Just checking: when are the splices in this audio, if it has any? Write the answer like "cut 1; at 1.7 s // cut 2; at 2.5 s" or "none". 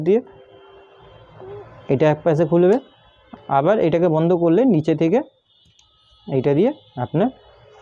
none